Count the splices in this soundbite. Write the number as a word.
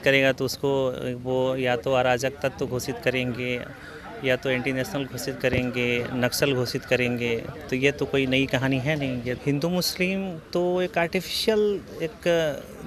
one